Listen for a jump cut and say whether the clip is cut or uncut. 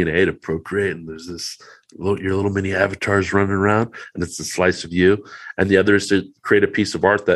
uncut